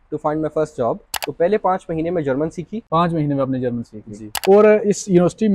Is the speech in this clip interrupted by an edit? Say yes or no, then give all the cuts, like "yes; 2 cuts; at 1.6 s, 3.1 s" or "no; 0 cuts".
yes; 3 cuts; at 1.1 s, 2.8 s, 4.4 s